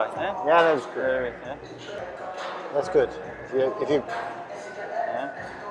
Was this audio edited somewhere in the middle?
yes; 1 cut; at 2.0 s

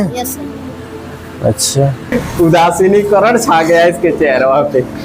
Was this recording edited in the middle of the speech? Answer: yes; 1 cut; at 2.1 s

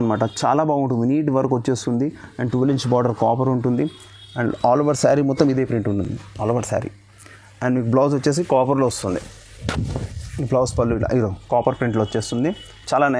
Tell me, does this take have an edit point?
no; 0 cuts

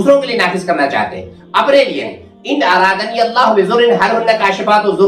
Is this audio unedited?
no; 1 cut; at 2.3 s

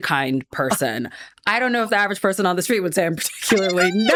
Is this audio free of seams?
yes; 0 cuts

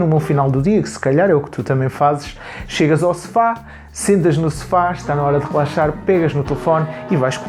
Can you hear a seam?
no; 0 cuts

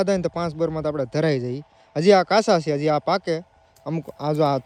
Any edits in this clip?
no; 0 cuts

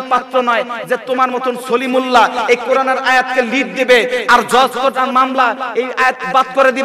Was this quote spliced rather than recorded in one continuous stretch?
no; 0 cuts

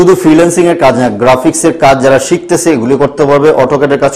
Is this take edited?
no; 0 cuts

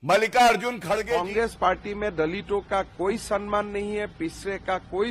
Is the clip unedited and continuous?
no; 1 cut; at 1.1 s

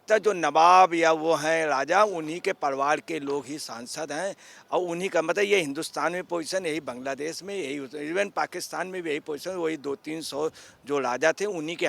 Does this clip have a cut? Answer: no; 0 cuts

